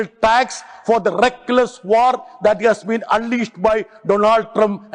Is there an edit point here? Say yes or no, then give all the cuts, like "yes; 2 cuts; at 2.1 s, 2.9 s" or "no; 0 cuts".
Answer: no; 0 cuts